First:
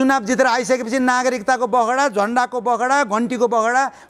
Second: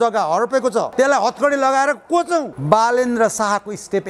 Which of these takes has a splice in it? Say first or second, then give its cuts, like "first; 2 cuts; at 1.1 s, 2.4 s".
second; 2 cuts; at 0.9 s, 2.5 s